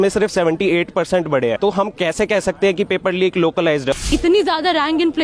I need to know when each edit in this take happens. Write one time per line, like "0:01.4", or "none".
0:01.6
0:04.0